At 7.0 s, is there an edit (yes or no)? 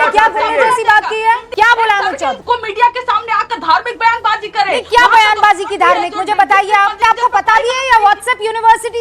yes